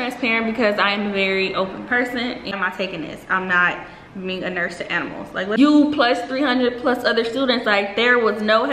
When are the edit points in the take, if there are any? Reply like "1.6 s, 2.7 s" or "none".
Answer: 2.5 s, 5.6 s